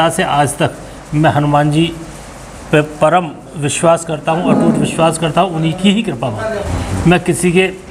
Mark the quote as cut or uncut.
cut